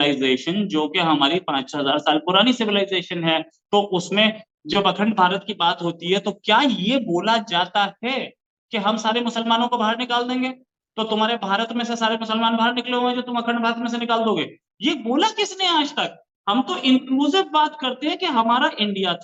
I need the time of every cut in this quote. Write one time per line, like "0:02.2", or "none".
none